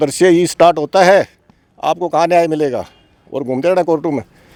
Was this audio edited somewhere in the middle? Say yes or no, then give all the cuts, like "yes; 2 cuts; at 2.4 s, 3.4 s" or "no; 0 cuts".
no; 0 cuts